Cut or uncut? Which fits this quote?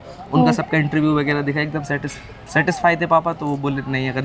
uncut